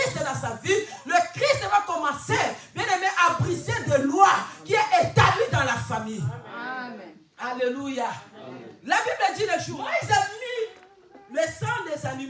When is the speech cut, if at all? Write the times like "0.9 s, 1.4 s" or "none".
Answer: 9.7 s

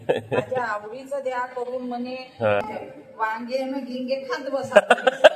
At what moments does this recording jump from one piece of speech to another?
2.6 s

